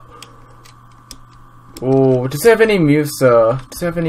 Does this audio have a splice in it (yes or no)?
no